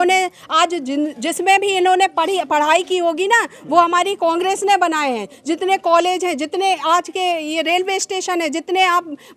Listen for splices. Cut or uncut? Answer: uncut